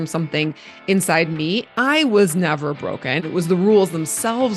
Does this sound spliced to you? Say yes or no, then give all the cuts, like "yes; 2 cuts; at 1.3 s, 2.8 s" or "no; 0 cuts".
yes; 2 cuts; at 1.7 s, 3.2 s